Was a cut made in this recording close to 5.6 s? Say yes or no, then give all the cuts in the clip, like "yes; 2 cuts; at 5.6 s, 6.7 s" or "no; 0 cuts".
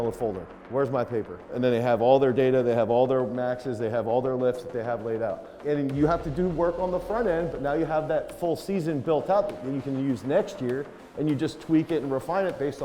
yes; 2 cuts; at 1.5 s, 5.6 s